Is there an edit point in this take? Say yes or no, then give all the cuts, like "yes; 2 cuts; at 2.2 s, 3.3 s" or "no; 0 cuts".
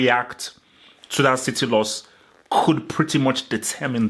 no; 0 cuts